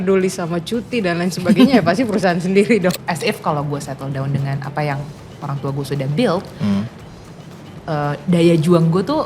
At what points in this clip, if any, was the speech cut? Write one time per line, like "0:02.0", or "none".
0:02.9